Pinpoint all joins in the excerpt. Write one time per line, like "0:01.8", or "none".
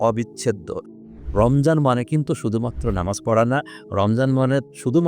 0:01.1